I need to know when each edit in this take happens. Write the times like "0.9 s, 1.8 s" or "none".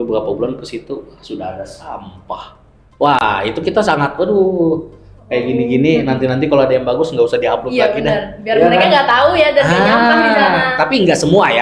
none